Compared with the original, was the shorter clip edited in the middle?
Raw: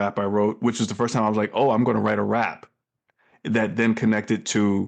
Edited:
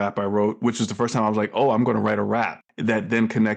yes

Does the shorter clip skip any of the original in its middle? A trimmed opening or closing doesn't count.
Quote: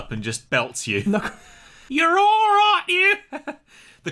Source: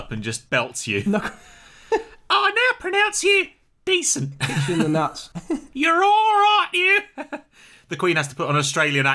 yes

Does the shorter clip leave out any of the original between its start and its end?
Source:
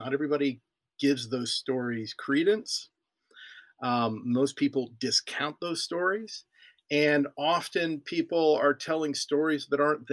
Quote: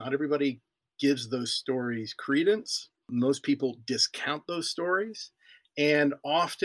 yes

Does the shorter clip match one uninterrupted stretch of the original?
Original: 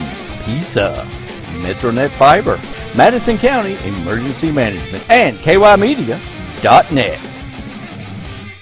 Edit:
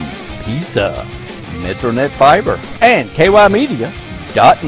no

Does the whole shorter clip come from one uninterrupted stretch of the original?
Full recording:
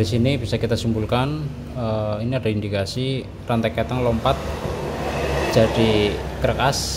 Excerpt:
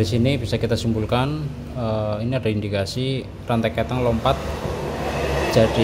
yes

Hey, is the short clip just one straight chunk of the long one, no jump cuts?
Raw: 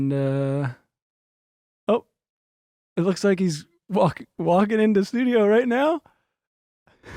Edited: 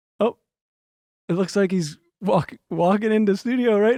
yes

